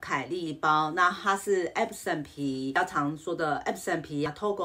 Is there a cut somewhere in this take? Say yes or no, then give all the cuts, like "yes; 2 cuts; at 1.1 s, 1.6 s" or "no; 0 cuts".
yes; 1 cut; at 2.7 s